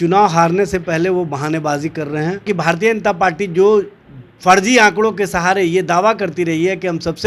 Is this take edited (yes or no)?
yes